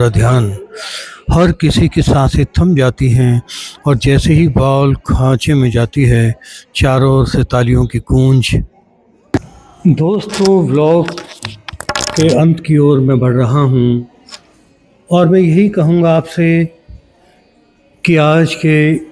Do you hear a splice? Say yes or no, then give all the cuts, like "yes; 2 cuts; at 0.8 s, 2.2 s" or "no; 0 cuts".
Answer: no; 0 cuts